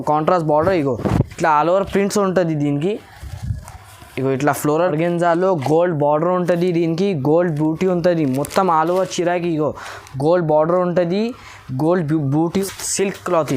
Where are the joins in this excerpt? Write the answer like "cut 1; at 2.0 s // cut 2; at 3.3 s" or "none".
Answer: cut 1; at 4.7 s // cut 2; at 12.5 s